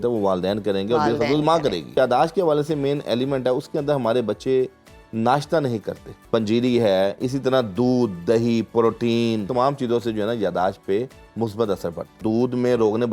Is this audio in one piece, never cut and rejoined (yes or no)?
no